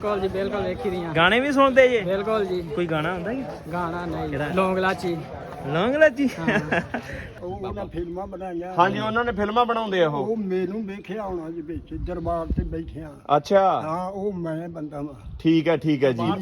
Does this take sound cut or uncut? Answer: cut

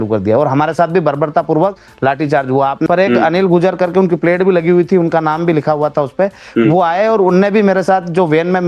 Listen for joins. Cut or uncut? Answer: cut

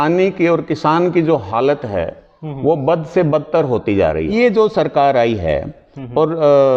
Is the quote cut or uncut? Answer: cut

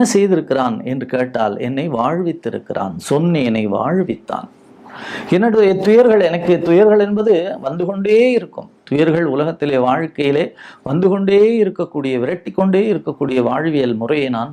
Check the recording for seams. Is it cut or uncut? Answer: uncut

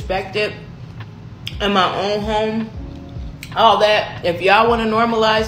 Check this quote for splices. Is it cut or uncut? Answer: uncut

